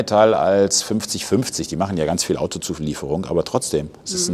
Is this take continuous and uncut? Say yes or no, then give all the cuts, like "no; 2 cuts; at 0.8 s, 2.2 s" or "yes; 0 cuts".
yes; 0 cuts